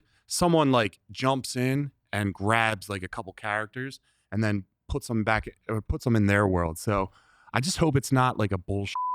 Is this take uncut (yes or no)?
yes